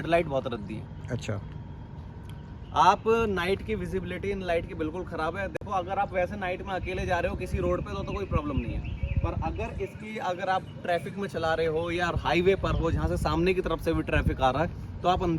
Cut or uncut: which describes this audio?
uncut